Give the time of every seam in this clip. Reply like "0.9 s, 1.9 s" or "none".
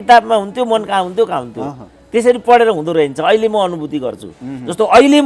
none